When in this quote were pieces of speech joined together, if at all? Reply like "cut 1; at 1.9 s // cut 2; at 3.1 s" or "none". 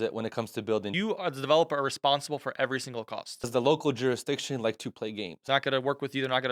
cut 1; at 0.9 s // cut 2; at 3.5 s // cut 3; at 5.4 s